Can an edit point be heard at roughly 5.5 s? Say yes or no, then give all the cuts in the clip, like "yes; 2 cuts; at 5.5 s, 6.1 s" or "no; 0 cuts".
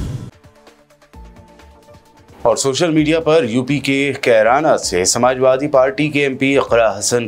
no; 1 cut; at 1.8 s